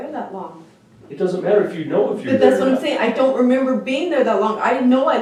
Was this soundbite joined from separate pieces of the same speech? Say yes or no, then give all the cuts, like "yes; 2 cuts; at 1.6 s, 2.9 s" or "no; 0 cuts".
no; 0 cuts